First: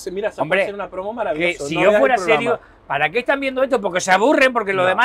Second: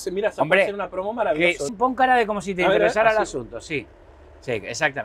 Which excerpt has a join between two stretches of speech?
second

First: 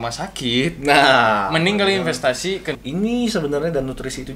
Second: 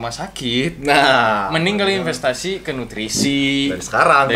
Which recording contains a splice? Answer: first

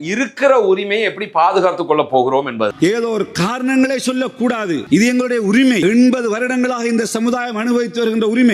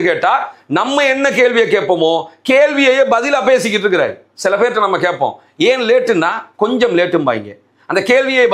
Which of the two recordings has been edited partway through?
first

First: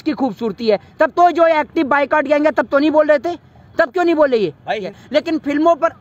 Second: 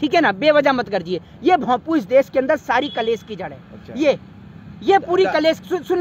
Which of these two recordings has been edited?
first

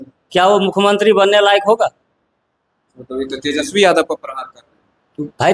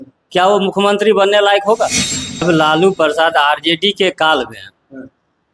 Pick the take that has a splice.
second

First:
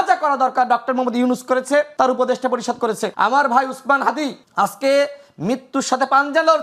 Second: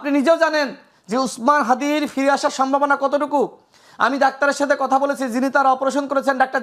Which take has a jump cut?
first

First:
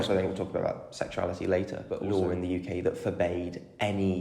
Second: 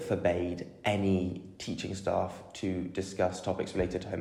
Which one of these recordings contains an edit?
first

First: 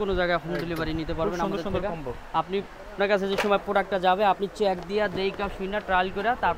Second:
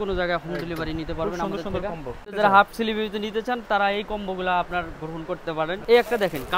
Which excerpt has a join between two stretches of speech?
second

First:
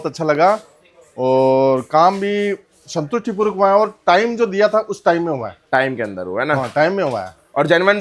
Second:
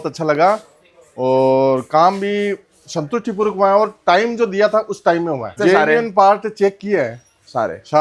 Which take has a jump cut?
second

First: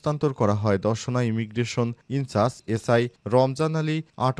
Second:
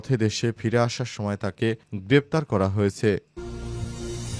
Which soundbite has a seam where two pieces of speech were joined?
second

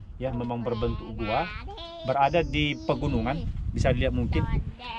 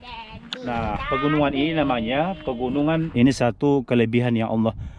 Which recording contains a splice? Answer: second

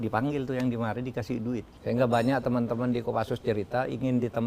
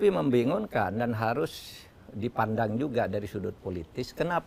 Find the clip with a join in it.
first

